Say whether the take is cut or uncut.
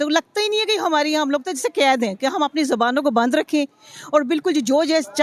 uncut